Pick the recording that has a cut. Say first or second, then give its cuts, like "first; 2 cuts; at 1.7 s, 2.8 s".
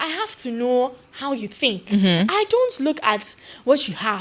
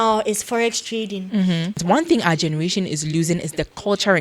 second; 1 cut; at 1.8 s